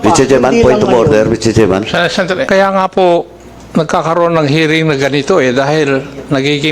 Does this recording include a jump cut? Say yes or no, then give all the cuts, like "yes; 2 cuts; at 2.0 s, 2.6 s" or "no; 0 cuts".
yes; 1 cut; at 2.5 s